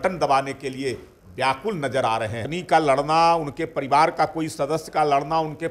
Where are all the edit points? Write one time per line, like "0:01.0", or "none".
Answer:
0:02.4